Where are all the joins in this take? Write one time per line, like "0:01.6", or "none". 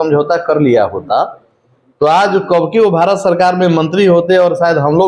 none